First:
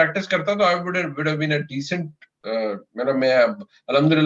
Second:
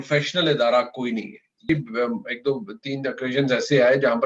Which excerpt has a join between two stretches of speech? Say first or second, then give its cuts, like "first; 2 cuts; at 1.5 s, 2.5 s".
second; 1 cut; at 1.7 s